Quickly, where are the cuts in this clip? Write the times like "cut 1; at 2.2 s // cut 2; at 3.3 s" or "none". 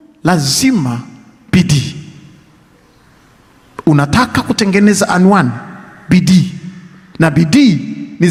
none